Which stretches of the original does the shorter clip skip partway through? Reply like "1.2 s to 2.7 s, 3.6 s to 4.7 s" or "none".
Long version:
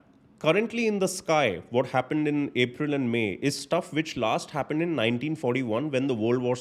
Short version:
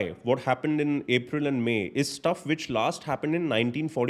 none